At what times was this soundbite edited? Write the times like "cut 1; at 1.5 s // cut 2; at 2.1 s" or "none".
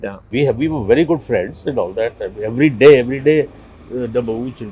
none